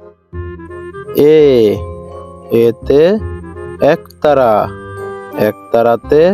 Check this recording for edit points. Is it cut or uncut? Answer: cut